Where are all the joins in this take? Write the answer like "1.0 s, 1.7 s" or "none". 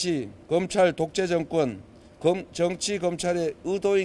none